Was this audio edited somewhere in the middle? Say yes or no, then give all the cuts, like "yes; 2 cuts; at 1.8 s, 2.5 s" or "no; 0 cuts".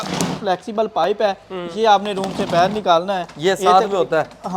no; 0 cuts